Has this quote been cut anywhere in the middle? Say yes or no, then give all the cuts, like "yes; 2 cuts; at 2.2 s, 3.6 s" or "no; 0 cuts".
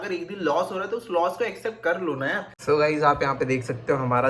yes; 1 cut; at 2.5 s